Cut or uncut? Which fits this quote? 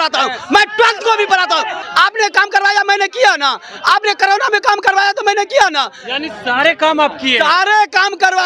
cut